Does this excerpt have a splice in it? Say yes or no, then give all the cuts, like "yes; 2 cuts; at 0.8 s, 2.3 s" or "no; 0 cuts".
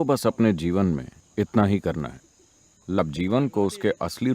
yes; 1 cut; at 3.0 s